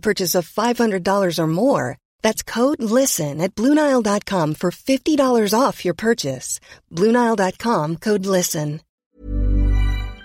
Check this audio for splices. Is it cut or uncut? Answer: cut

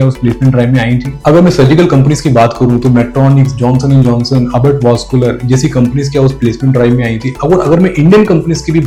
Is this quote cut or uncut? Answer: uncut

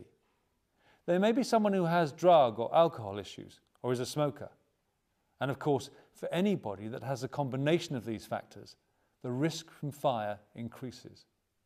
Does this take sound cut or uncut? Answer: uncut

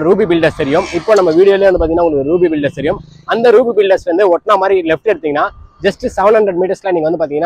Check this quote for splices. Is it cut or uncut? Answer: uncut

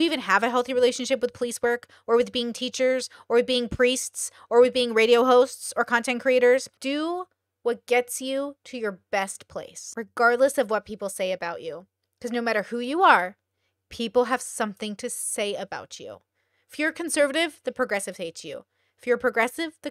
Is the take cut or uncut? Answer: cut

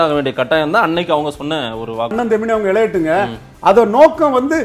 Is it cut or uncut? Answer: cut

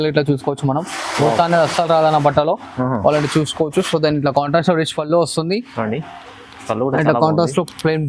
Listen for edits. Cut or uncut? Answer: uncut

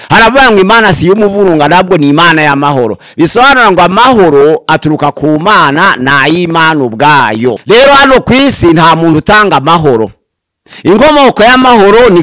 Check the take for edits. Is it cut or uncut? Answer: cut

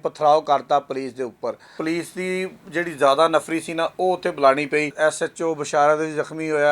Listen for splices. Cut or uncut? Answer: cut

